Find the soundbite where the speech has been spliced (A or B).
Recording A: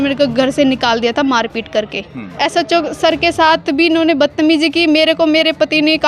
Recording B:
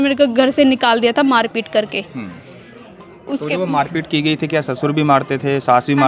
A